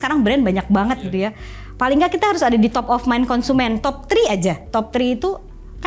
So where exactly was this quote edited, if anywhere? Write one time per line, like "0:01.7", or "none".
none